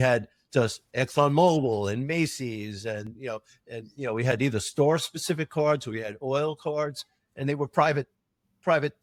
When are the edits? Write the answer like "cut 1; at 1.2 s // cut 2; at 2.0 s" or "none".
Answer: none

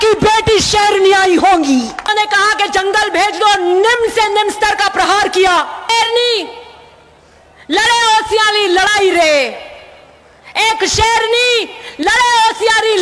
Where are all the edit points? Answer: cut 1; at 2.1 s // cut 2; at 5.9 s

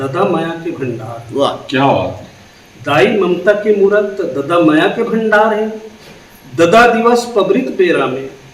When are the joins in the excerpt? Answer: none

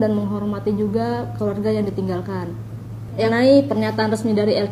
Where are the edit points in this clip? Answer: cut 1; at 3.3 s

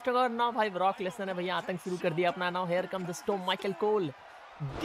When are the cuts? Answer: none

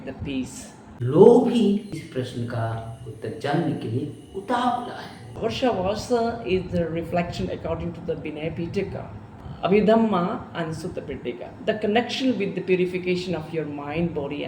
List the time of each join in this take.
cut 1; at 0.9 s // cut 2; at 1.9 s // cut 3; at 5.3 s // cut 4; at 9.4 s

